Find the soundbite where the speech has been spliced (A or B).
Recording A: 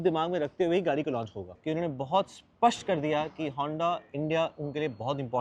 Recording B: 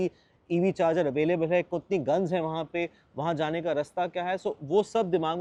A